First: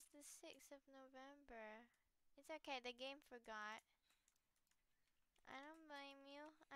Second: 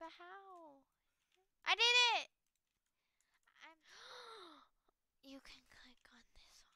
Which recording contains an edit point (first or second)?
second